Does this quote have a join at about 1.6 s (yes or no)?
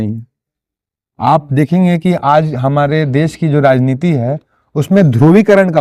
no